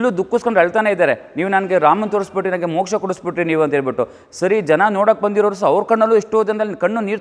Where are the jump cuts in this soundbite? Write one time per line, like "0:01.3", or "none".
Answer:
none